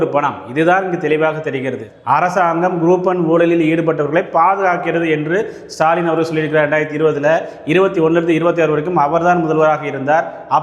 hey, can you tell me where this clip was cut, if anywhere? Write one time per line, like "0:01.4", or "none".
0:01.8